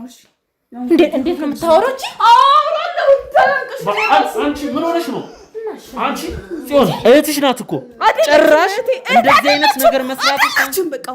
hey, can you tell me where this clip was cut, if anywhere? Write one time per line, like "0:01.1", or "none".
none